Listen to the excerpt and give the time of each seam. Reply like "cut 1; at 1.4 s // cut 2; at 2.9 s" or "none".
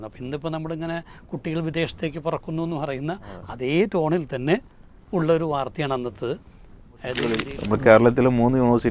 cut 1; at 7.5 s